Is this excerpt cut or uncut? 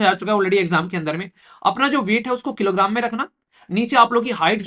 uncut